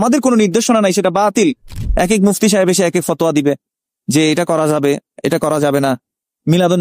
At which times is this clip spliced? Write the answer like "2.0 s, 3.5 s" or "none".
1.7 s